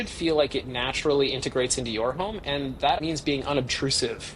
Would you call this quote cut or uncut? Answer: cut